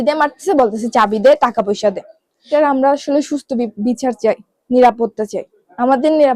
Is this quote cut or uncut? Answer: cut